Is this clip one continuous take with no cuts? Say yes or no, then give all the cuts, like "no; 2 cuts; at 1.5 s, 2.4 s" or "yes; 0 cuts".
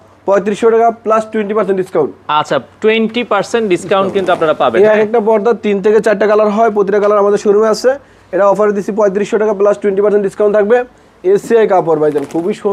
yes; 0 cuts